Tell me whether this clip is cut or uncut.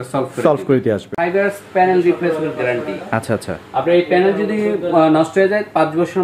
cut